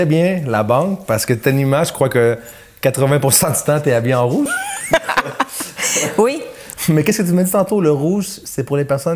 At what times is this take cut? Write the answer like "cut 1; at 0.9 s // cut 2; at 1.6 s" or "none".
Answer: none